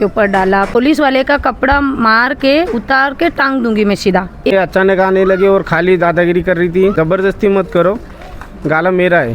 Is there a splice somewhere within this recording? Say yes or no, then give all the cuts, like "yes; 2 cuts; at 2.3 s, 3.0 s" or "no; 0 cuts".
yes; 3 cuts; at 0.8 s, 4.5 s, 6.9 s